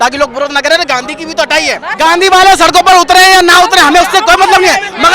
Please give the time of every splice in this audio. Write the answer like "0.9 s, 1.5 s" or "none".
1.9 s